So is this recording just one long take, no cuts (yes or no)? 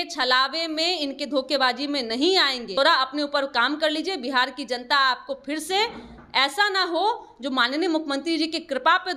no